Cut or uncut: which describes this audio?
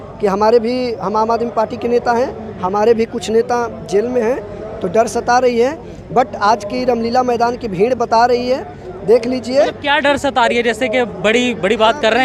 uncut